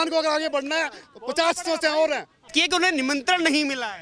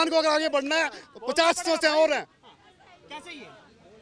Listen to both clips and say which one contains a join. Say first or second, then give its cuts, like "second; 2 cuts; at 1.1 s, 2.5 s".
first; 1 cut; at 2.5 s